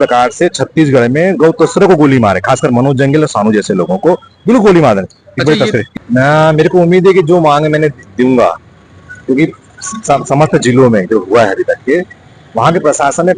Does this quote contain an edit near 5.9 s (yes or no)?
yes